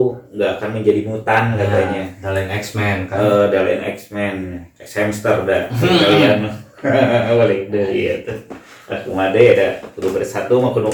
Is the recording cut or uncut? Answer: uncut